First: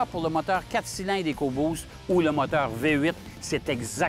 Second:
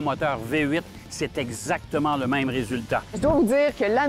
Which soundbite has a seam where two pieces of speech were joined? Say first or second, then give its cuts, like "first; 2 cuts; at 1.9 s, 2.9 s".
second; 1 cut; at 3.2 s